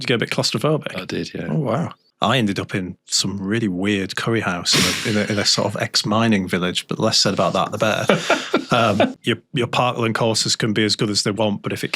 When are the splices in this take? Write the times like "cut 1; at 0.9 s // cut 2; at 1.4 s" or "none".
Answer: cut 1; at 2.0 s // cut 2; at 9.1 s